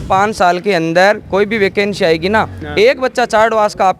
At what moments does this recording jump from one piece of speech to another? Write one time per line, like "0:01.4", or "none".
none